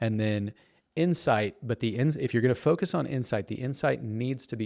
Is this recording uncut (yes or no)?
yes